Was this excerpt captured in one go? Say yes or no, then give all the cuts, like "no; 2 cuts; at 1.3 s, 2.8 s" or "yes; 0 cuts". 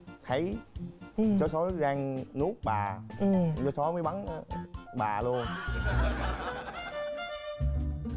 no; 1 cut; at 5.6 s